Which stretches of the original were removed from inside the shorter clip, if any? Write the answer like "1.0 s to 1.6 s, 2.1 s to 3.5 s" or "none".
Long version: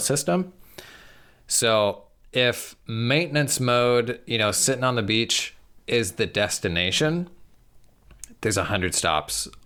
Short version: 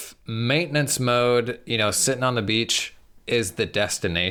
none